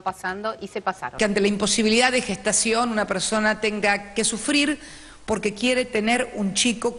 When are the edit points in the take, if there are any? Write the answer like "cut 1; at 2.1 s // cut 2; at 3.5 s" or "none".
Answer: cut 1; at 1.2 s

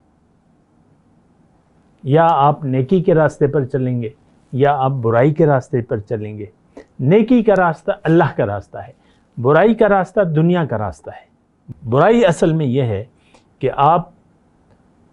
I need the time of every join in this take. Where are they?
cut 1; at 11.6 s

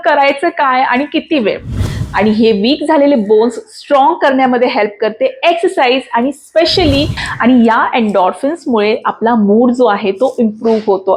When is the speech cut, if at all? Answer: cut 1; at 2.0 s // cut 2; at 7.2 s

